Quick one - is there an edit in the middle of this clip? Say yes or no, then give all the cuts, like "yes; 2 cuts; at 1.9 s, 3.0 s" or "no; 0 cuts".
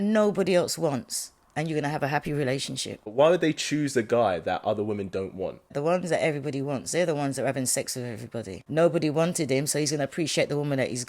yes; 3 cuts; at 3.1 s, 5.7 s, 8.6 s